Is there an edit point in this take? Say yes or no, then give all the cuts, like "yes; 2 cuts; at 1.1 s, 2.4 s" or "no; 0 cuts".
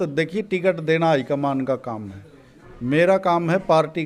no; 0 cuts